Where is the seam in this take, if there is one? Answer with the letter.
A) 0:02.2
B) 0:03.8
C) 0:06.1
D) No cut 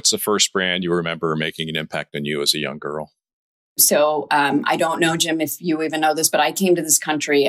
B